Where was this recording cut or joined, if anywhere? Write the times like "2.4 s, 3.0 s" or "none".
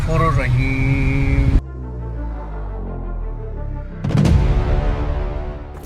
none

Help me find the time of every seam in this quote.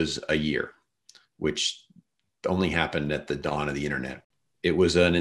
4.2 s

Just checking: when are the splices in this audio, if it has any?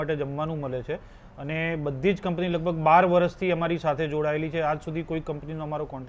none

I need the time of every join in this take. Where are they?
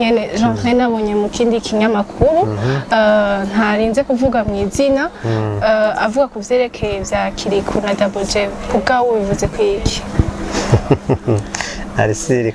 none

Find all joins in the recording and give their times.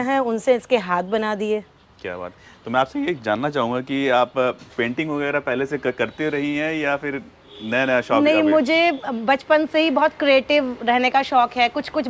none

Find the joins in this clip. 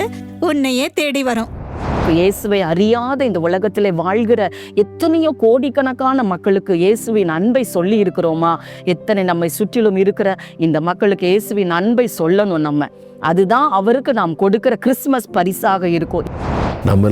2.0 s, 16.3 s

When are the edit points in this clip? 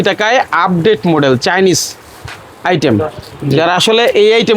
none

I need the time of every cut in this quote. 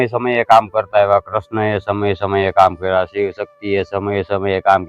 none

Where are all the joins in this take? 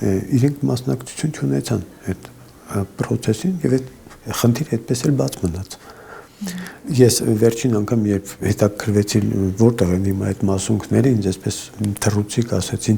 none

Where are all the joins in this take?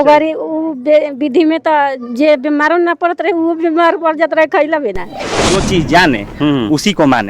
5.4 s

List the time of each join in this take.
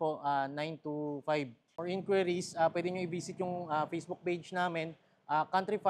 1.7 s

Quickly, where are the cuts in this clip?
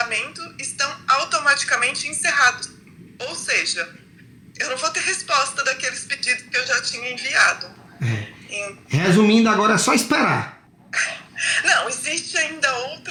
none

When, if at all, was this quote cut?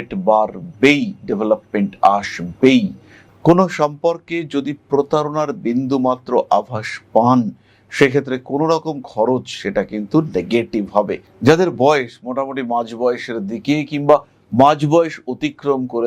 3.3 s, 11.3 s

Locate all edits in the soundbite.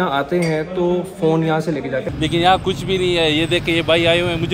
2.1 s

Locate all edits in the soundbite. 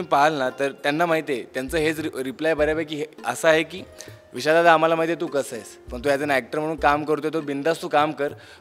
none

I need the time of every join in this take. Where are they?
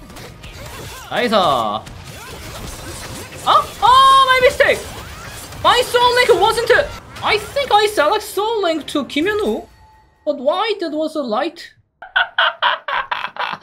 7.0 s, 11.9 s

